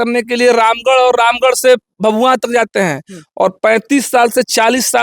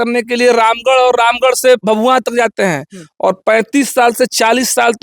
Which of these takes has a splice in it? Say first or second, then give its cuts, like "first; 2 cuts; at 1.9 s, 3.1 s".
second; 1 cut; at 1.8 s